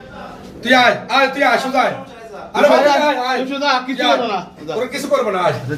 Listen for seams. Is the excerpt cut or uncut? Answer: uncut